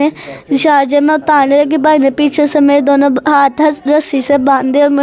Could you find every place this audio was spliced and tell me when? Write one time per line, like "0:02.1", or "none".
none